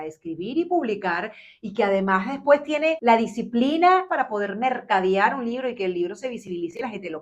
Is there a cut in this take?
yes; 1 cut; at 4.1 s

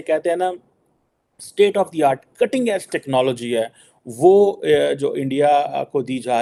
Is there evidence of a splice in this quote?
no; 0 cuts

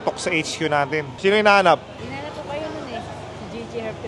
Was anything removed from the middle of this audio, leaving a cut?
yes; 2 cuts; at 1.2 s, 2.0 s

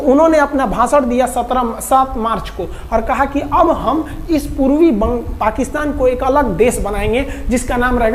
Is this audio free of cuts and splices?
yes; 0 cuts

